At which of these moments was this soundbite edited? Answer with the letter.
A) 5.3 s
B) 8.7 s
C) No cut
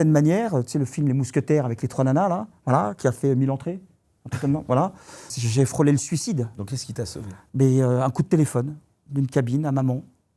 A